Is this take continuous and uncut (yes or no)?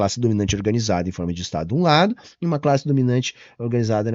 yes